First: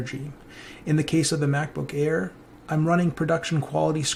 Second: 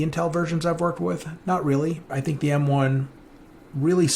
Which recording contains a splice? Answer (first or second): second